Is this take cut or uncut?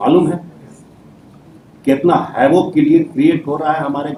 uncut